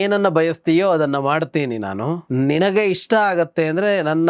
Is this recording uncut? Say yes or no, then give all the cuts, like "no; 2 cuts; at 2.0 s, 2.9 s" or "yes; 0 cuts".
no; 1 cut; at 2.2 s